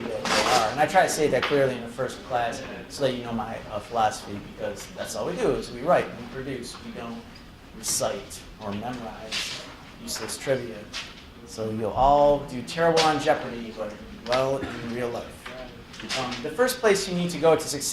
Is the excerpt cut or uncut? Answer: cut